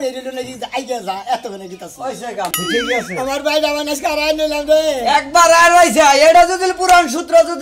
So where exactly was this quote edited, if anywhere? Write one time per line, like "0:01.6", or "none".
0:02.5